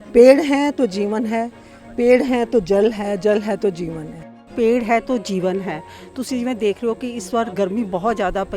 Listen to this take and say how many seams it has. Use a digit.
1